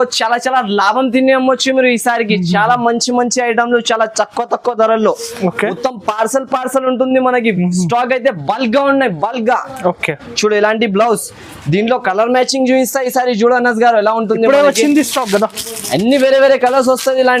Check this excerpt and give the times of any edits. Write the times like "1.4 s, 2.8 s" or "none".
none